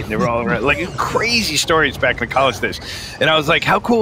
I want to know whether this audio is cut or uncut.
uncut